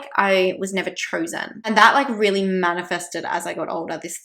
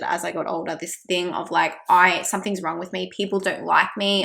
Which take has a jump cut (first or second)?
first